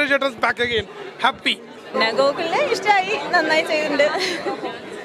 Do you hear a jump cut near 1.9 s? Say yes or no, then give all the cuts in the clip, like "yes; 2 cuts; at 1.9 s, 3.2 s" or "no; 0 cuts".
yes; 1 cut; at 1.9 s